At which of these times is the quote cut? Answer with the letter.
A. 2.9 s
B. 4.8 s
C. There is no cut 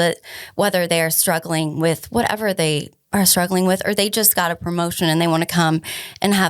A